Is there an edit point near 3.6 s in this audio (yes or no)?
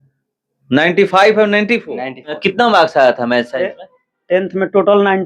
no